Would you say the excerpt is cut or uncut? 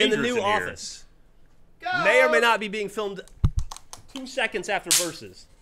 uncut